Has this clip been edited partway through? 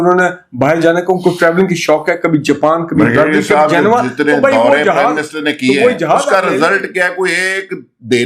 no; 0 cuts

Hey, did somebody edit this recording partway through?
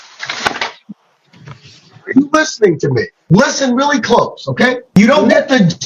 yes; 1 cut; at 4.9 s

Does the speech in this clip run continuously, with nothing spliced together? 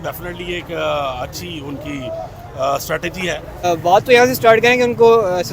no; 1 cut; at 3.6 s

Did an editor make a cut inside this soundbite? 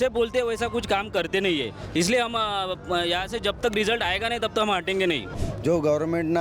yes; 1 cut; at 5.4 s

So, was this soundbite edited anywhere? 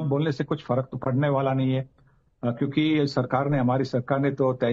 no; 0 cuts

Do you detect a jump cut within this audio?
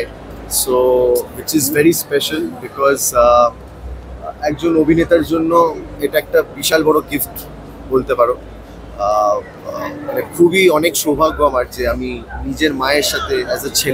no; 0 cuts

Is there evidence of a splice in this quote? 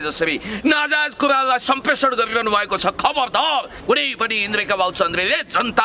yes; 1 cut; at 3.7 s

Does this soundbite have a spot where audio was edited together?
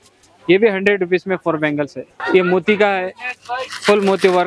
no; 0 cuts

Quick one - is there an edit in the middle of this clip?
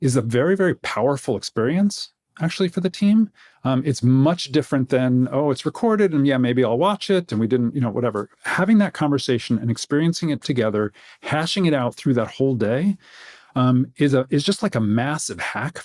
no; 0 cuts

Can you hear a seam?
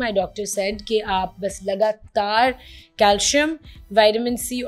no; 0 cuts

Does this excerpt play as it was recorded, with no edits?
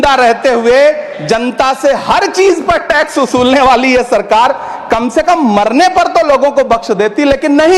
yes; 0 cuts

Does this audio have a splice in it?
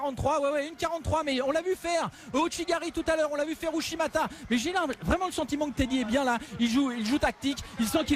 yes; 1 cut; at 3.8 s

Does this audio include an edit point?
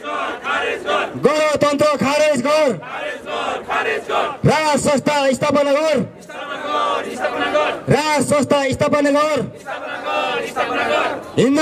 no; 0 cuts

